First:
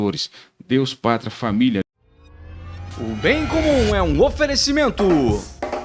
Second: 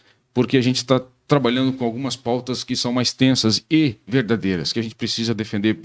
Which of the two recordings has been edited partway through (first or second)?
first